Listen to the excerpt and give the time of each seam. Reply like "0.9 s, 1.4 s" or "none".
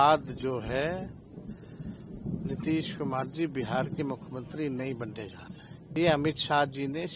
6.0 s